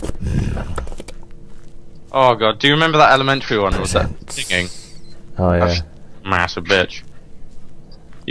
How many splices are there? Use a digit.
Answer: 1